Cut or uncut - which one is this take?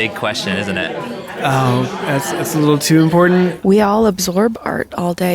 cut